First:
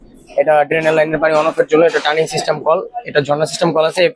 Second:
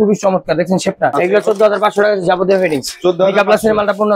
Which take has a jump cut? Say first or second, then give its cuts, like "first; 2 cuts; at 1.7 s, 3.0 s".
second; 1 cut; at 1.1 s